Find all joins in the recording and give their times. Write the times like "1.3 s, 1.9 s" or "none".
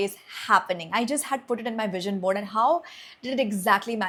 none